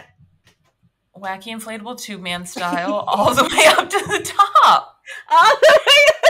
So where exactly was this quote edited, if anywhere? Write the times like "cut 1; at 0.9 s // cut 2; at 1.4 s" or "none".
none